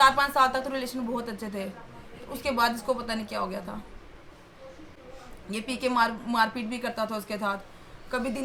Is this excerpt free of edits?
yes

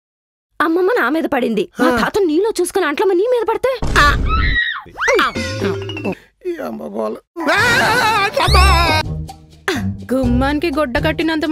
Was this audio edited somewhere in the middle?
yes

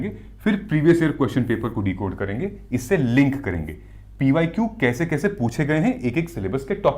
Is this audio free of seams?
yes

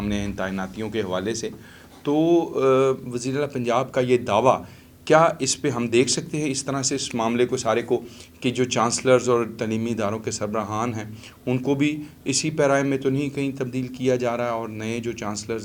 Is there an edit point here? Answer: no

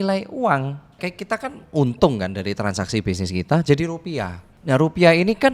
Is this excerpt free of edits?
no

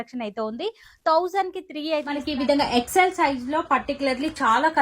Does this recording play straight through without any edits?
no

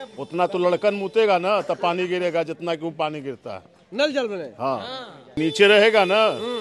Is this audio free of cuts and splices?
no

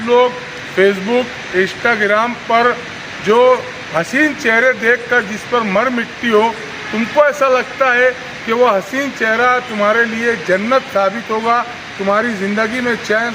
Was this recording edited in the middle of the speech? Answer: no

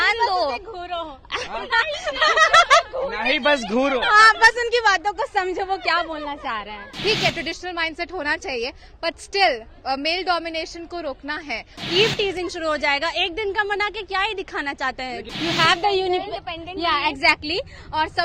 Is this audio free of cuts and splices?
no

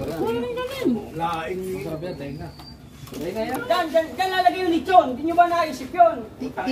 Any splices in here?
yes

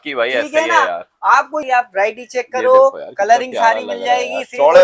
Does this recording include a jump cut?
yes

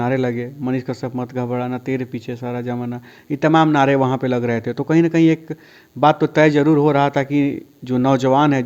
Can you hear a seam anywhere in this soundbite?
no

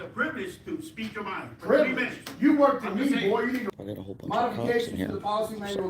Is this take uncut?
no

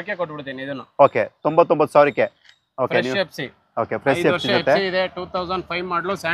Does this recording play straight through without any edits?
yes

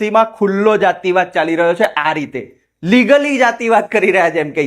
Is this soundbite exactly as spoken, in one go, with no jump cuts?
yes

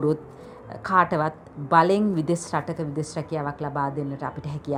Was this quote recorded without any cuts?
yes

